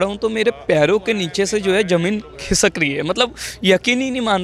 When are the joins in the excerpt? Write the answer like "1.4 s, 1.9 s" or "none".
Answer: none